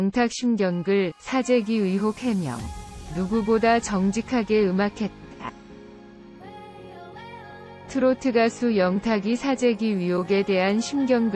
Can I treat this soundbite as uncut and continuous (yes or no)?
no